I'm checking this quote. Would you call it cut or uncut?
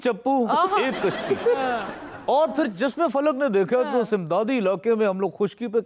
uncut